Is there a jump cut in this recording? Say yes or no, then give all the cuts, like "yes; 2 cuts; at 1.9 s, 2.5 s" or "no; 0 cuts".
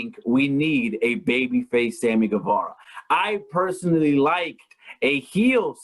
no; 0 cuts